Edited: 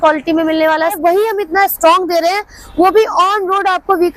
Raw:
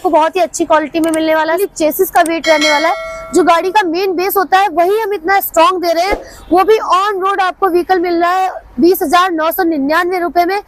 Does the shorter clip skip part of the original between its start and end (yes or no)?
yes